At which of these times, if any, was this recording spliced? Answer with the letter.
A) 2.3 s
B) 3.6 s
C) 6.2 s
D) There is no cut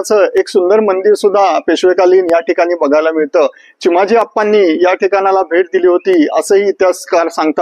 D